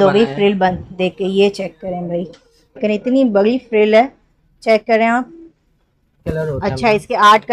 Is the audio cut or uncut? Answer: cut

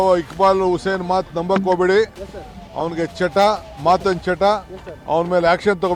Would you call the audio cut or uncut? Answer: uncut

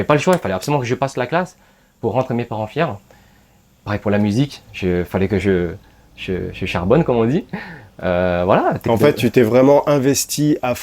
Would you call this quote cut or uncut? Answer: uncut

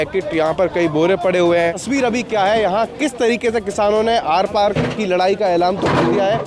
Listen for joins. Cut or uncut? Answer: cut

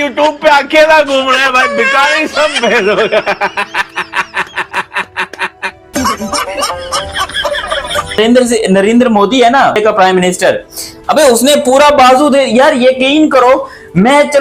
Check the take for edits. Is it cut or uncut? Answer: cut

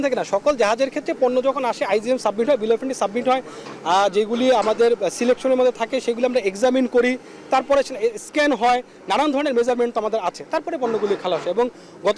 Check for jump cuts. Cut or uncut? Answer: uncut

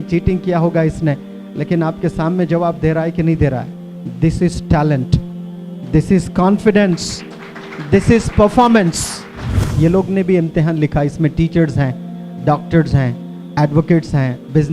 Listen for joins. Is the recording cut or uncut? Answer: cut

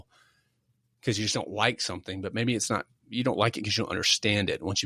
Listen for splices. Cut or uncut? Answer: uncut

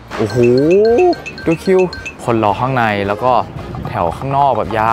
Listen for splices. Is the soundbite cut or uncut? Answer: cut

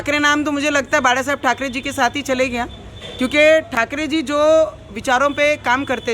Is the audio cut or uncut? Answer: uncut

